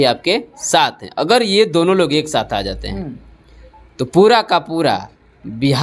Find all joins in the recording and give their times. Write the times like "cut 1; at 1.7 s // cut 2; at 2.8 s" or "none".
none